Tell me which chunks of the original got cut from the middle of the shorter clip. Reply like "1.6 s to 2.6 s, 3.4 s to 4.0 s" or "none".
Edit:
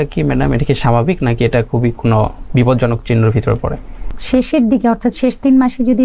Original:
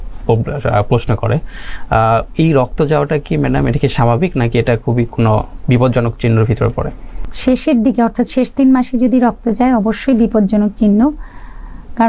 none

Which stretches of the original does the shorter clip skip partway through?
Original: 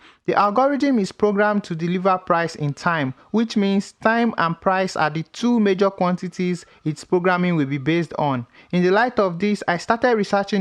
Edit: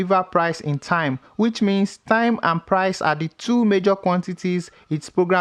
none

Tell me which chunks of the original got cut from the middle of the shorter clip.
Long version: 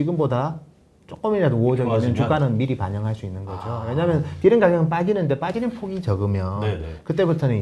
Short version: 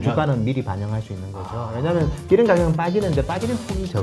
none

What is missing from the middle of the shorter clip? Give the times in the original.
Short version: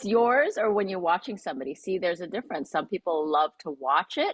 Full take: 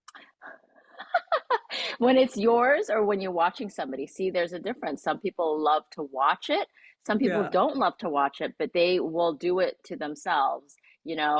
none

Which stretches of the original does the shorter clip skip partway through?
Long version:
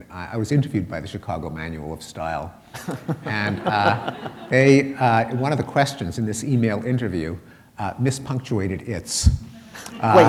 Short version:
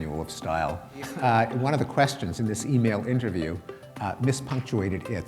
2.9 s to 4.9 s

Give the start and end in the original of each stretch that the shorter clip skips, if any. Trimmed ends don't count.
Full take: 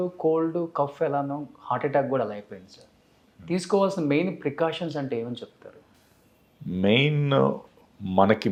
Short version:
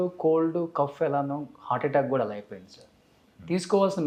none

